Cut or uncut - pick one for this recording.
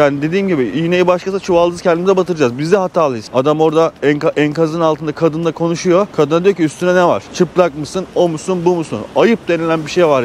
cut